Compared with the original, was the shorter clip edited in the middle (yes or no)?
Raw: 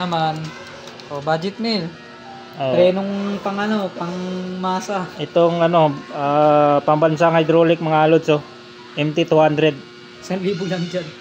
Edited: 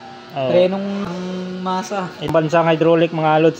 yes